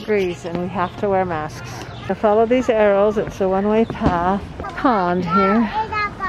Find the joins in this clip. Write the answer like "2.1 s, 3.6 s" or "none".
none